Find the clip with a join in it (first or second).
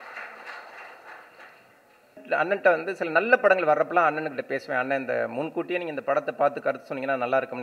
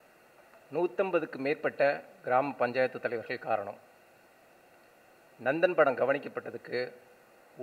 first